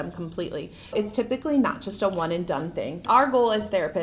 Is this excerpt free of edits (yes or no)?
no